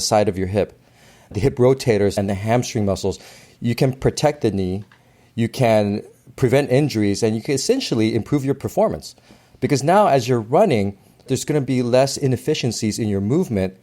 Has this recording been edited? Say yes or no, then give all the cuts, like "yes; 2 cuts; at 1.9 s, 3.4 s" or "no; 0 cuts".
yes; 2 cuts; at 2.1 s, 11.3 s